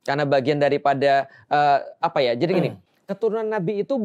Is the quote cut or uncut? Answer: uncut